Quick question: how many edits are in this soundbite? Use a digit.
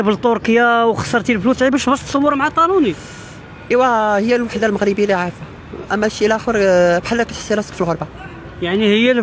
0